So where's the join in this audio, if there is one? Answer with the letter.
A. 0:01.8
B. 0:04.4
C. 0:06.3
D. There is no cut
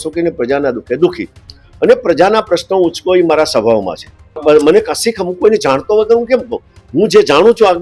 B